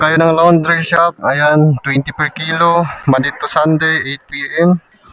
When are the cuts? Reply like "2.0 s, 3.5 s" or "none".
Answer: 1.2 s